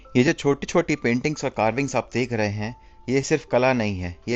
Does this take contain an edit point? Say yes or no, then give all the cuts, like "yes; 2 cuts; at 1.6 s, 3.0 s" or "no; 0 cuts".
no; 0 cuts